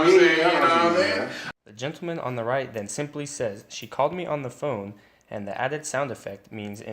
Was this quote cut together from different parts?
no; 0 cuts

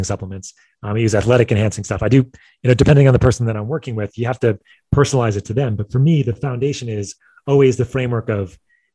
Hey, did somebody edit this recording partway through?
no; 0 cuts

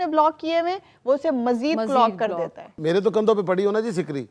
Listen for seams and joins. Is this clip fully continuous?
no; 1 cut; at 2.7 s

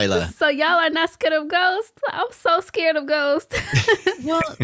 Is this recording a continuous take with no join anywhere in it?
yes; 0 cuts

